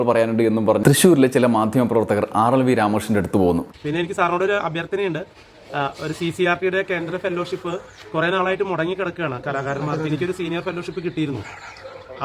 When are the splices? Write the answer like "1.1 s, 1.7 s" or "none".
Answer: 3.7 s